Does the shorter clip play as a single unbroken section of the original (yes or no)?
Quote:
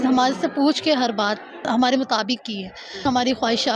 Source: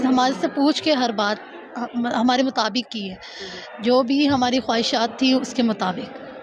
no